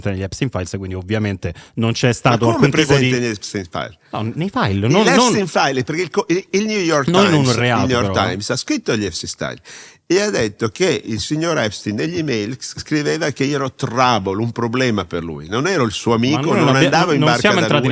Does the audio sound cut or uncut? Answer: uncut